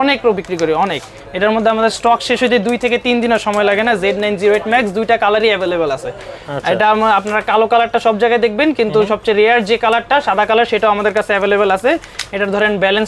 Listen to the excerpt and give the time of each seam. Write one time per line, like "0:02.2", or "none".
none